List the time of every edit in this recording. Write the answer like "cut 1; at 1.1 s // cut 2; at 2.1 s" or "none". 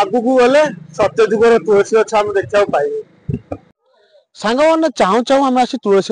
cut 1; at 3.7 s

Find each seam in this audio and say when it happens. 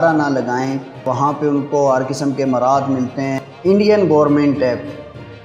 cut 1; at 1.0 s // cut 2; at 3.4 s

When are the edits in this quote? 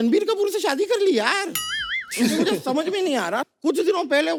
none

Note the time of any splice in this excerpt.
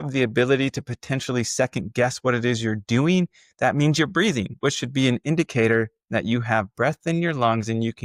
none

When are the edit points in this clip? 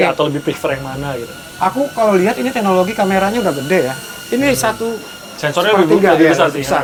none

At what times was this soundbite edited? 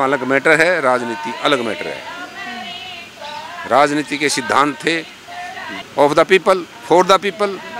none

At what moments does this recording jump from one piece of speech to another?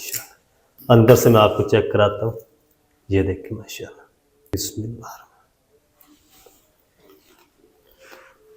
cut 1; at 4.5 s

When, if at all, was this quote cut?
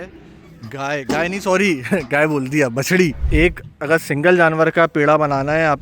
cut 1; at 3.2 s

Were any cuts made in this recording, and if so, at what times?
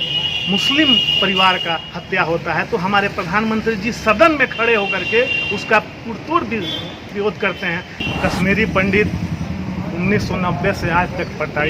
cut 1; at 8.0 s

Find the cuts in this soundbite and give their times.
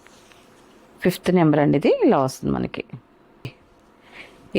cut 1; at 3.4 s

